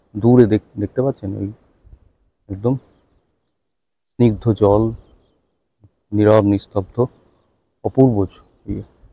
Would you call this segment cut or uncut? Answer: uncut